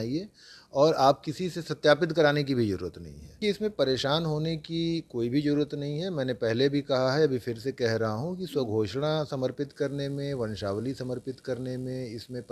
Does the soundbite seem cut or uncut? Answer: cut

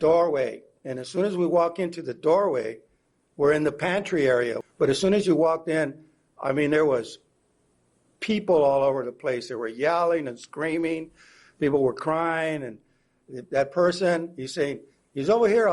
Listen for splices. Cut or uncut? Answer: cut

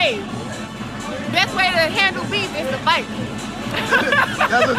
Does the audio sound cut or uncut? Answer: uncut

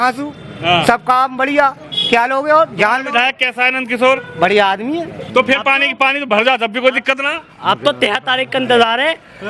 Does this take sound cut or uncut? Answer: cut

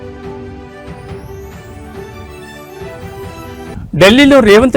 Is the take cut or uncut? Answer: cut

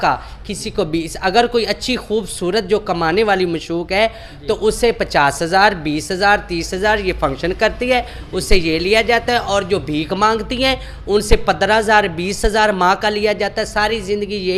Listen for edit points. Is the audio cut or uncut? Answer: uncut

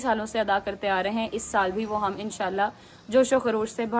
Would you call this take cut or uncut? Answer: uncut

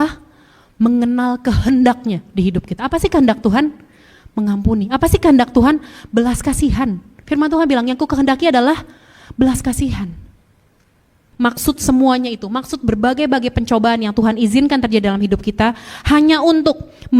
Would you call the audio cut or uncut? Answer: cut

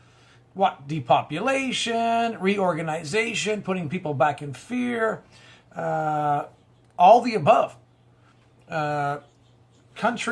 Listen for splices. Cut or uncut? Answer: cut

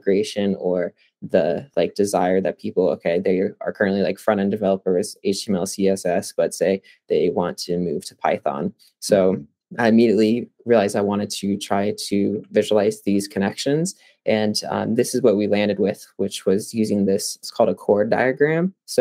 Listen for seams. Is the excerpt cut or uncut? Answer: uncut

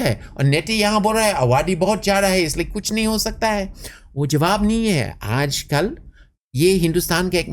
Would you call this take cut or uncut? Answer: uncut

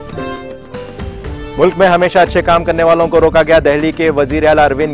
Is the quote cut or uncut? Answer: cut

